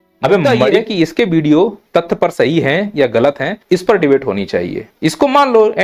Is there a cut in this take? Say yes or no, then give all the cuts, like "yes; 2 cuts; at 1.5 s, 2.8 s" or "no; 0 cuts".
yes; 4 cuts; at 0.8 s, 1.8 s, 3.5 s, 4.8 s